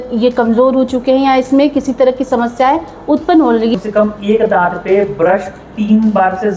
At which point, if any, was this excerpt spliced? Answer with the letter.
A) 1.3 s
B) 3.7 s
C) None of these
B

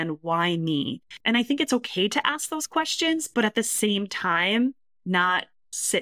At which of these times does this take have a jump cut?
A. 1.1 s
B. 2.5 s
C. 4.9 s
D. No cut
A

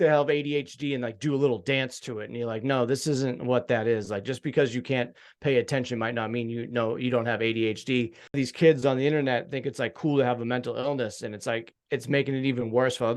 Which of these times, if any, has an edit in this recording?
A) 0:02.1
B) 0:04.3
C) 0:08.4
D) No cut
C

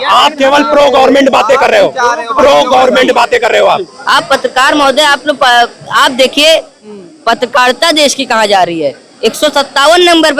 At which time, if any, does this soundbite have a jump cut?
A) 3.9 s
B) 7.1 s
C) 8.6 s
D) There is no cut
A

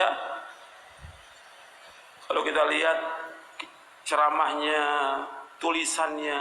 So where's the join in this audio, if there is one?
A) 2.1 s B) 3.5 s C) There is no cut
A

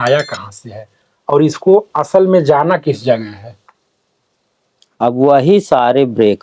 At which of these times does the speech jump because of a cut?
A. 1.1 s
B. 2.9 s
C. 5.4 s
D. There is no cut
D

